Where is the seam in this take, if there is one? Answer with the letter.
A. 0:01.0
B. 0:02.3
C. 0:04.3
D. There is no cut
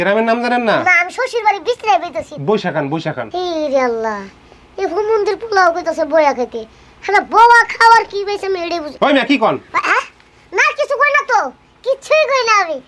B